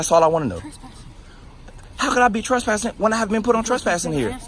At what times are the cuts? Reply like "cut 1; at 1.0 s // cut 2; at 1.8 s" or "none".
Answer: none